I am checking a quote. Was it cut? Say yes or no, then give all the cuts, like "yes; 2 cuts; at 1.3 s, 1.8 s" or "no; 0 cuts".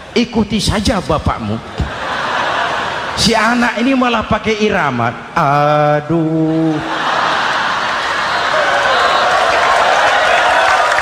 no; 0 cuts